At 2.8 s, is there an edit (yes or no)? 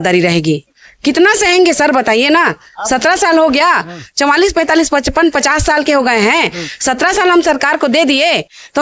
no